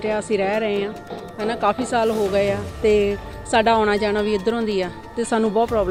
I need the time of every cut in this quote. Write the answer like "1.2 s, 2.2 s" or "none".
none